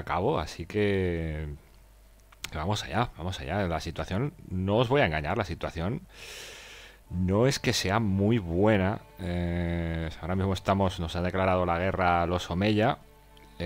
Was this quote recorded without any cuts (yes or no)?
no